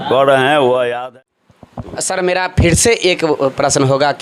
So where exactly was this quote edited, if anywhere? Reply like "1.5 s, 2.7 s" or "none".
1.0 s